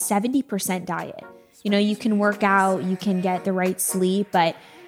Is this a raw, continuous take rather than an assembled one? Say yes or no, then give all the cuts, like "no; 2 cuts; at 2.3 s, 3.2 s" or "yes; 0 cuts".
yes; 0 cuts